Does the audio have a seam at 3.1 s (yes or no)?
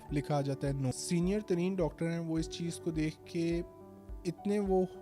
no